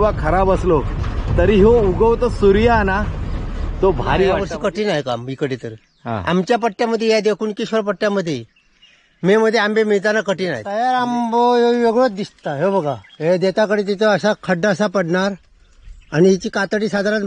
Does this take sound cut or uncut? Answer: cut